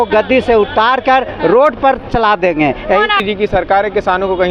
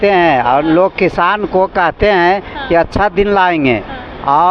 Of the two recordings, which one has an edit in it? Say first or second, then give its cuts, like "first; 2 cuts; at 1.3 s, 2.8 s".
first; 1 cut; at 3.2 s